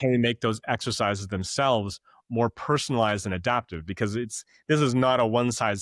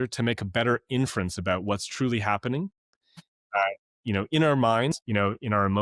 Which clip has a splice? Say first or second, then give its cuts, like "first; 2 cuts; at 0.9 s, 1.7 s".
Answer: second; 1 cut; at 4.9 s